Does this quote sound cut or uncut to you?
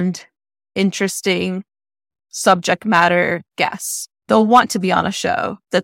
cut